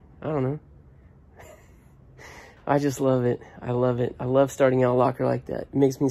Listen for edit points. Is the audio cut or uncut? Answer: uncut